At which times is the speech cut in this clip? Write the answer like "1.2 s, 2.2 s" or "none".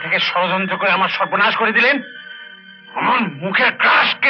none